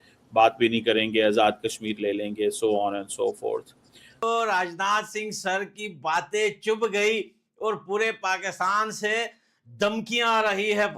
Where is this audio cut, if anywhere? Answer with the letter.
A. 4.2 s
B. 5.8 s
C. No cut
A